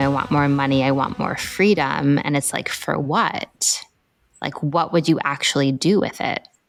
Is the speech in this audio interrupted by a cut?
no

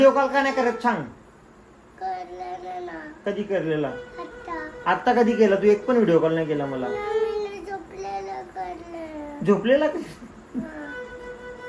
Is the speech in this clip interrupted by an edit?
no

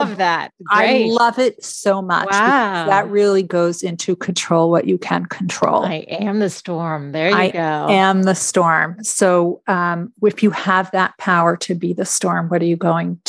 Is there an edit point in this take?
no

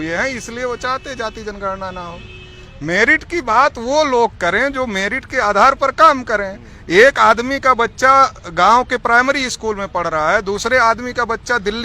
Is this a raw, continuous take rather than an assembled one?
yes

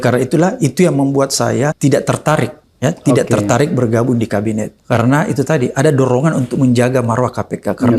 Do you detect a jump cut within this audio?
yes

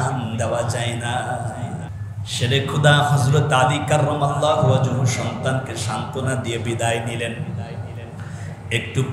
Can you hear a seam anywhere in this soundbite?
yes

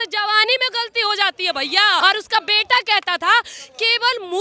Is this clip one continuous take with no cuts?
no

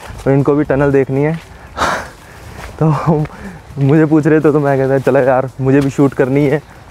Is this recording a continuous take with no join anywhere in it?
yes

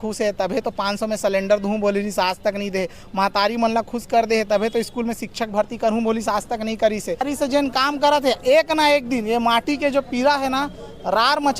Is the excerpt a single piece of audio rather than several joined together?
no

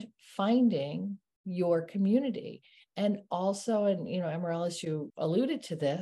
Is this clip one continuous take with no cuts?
no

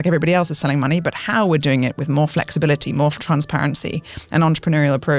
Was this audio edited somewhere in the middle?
no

